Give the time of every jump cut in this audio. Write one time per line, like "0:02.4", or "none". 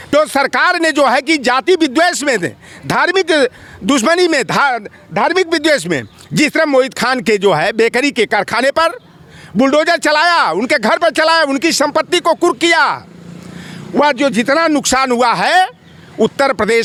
none